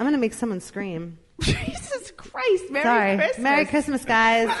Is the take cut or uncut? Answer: uncut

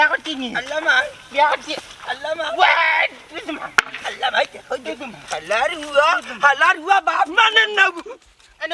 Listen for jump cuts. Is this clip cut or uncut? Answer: uncut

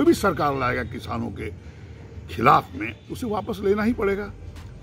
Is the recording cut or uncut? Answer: uncut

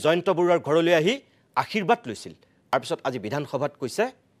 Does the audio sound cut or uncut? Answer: cut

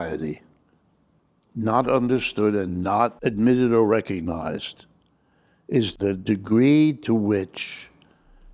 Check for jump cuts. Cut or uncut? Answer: cut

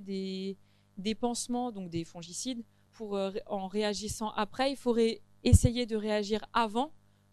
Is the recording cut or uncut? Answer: cut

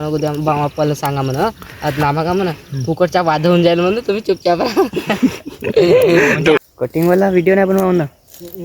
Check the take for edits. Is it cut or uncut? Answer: cut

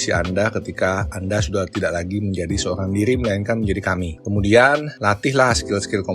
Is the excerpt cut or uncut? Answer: cut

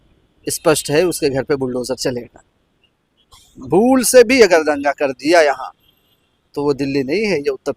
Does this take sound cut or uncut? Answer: uncut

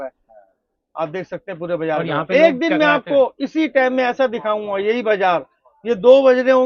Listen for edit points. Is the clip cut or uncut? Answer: uncut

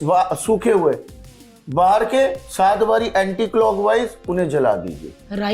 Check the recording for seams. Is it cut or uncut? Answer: uncut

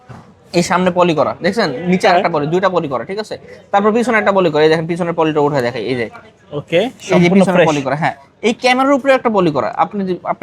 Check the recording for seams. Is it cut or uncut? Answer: uncut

